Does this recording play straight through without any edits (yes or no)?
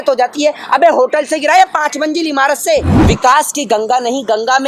no